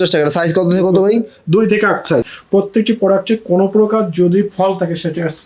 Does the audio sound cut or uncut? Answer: cut